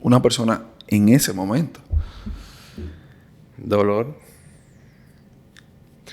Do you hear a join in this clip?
no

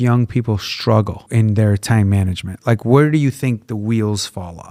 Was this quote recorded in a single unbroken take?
yes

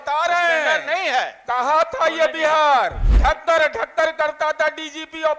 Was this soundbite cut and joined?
yes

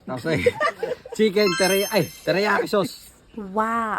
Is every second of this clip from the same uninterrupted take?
no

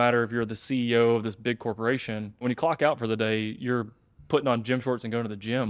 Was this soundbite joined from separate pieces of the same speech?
yes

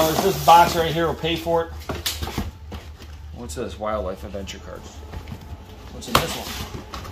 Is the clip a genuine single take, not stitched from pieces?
yes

